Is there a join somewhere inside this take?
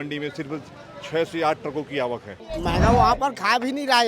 yes; 1 cut; at 2.4 s

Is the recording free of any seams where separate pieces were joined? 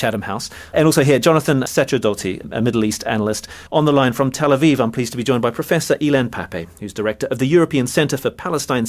no; 1 cut; at 1.1 s

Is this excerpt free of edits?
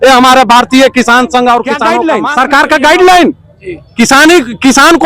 no; 1 cut; at 1.9 s

